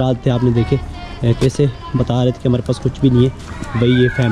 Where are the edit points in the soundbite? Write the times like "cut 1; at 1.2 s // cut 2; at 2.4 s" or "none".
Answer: none